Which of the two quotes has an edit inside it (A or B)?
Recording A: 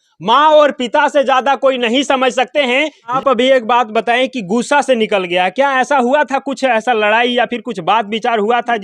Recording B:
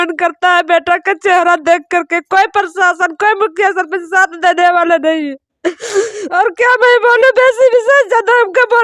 A